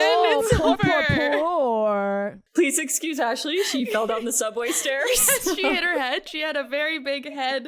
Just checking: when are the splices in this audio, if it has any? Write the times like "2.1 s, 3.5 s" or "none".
2.3 s

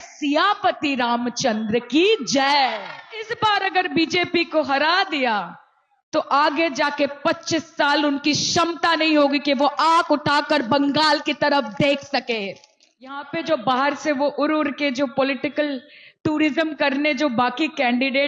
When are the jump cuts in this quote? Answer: 3.3 s, 13.3 s

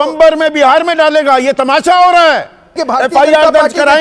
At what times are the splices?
2.8 s

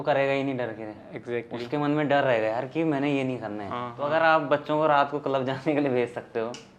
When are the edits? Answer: 3.9 s

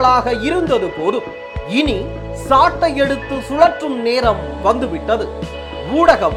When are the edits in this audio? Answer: none

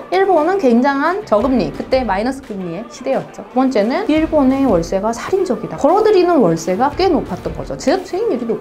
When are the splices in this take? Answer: 3.7 s

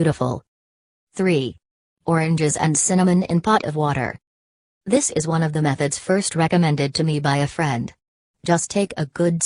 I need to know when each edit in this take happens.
4.0 s

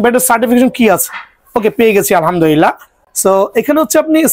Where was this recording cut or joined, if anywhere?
none

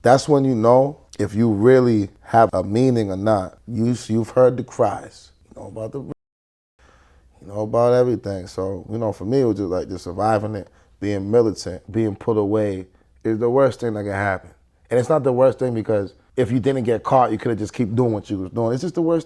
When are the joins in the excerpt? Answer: 11.7 s, 16.2 s

